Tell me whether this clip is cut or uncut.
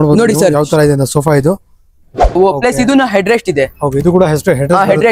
cut